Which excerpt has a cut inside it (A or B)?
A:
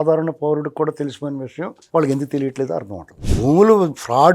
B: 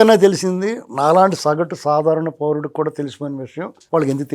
A